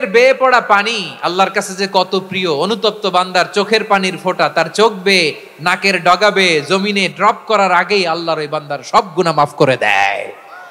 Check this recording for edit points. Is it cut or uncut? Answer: uncut